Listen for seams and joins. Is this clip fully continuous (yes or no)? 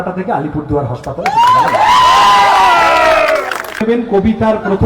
no